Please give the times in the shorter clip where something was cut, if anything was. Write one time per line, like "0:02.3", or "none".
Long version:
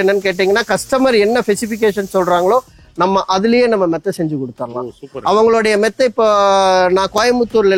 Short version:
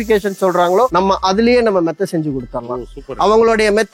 0:00.9